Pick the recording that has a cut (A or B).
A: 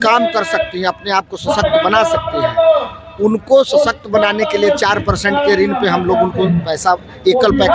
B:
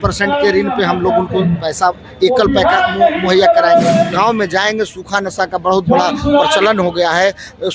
B